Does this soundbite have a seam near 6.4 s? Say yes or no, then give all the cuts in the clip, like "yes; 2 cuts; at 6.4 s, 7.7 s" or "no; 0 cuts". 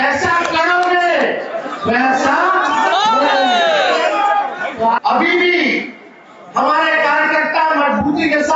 no; 1 cut; at 5.0 s